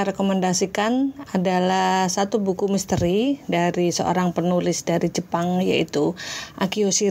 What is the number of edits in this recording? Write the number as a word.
zero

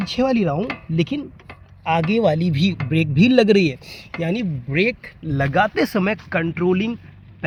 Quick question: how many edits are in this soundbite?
zero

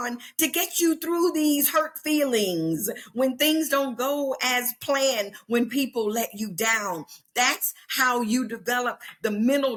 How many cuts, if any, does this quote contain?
zero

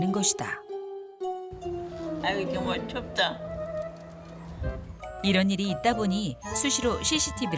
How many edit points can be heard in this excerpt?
one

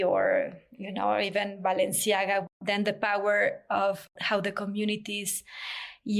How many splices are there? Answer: one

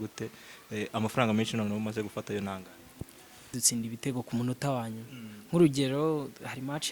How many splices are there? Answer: one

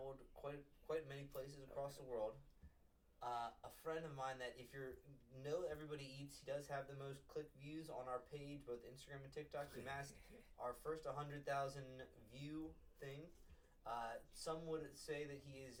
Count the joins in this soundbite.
zero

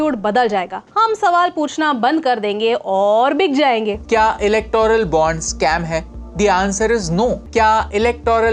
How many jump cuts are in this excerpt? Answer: two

